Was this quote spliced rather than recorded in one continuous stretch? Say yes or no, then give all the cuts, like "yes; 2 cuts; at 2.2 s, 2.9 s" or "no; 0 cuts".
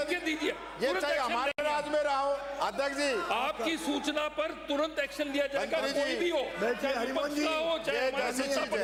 no; 0 cuts